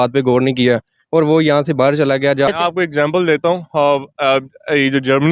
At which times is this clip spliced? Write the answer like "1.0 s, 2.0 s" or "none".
2.5 s